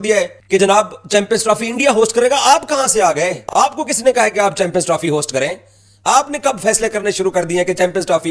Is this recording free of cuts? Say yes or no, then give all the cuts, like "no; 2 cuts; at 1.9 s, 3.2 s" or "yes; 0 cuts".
yes; 0 cuts